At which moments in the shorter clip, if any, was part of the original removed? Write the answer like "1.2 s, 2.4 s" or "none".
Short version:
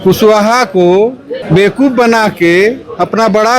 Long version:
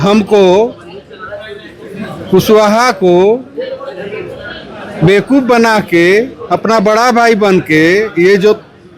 1.3 s